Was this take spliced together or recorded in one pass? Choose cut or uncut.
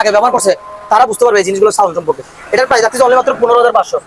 uncut